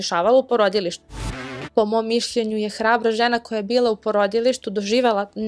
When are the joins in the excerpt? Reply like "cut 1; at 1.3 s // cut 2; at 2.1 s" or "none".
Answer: cut 1; at 1.1 s